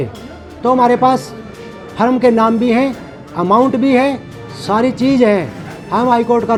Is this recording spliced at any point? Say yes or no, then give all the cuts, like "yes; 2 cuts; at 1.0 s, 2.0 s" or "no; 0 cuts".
no; 0 cuts